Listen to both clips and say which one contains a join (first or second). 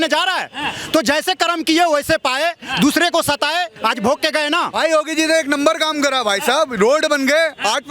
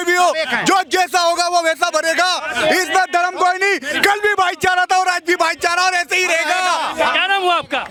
first